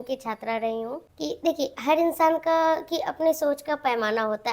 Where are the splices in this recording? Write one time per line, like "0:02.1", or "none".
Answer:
0:01.0